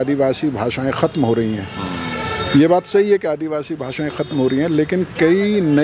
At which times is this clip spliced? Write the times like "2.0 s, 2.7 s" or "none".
none

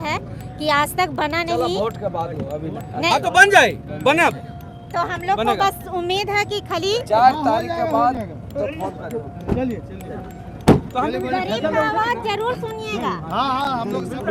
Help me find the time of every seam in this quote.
none

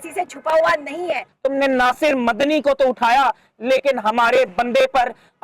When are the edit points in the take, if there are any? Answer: 1.3 s

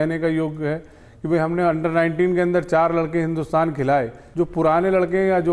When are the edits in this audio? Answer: 4.2 s

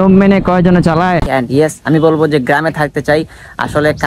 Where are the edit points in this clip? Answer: 1.3 s

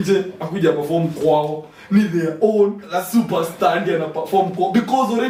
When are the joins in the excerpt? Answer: none

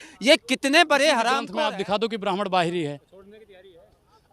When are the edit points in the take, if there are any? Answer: 1.4 s

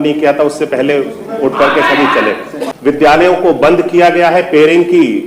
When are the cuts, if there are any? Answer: 2.7 s

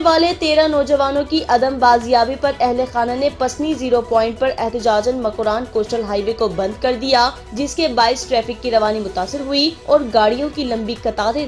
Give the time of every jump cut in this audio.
7.4 s, 9.8 s

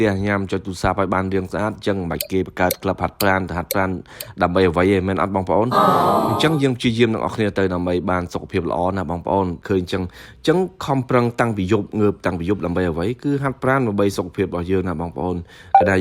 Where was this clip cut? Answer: 9.6 s

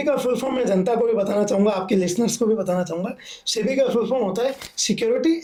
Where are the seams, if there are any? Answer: none

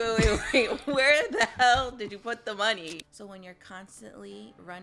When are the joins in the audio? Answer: 3.0 s

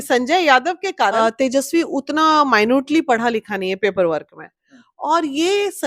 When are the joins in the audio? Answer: 1.1 s

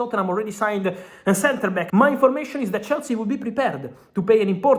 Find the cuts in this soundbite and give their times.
1.9 s

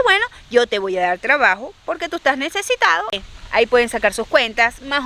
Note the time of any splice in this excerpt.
3.2 s

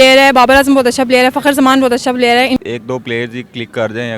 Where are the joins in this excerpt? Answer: 2.6 s

